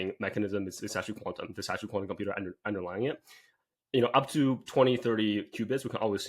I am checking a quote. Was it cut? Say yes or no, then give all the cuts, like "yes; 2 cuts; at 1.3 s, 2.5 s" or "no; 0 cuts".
no; 0 cuts